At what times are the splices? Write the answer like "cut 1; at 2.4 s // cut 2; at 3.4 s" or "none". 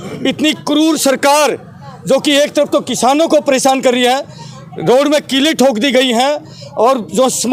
none

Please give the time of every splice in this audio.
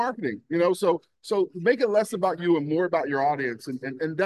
none

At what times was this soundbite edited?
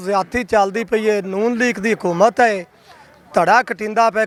none

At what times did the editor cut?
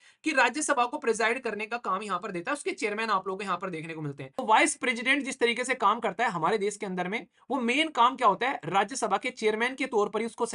cut 1; at 4.3 s

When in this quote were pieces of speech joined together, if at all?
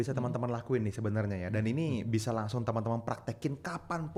none

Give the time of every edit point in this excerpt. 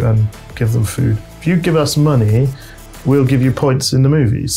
cut 1; at 1.3 s

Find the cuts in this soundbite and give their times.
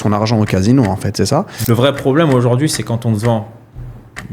cut 1; at 1.5 s

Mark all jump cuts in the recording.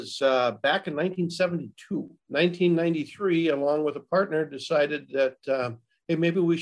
cut 1; at 2.2 s

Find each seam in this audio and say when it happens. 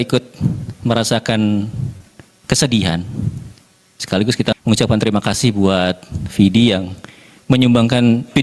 none

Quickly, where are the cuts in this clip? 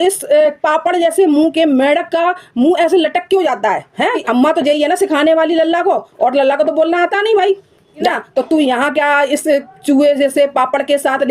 cut 1; at 4.2 s // cut 2; at 8.1 s

